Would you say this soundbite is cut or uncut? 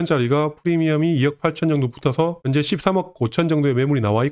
uncut